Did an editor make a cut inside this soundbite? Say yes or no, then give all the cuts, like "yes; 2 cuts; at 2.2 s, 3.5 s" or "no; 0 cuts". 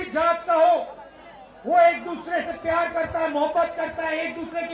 no; 0 cuts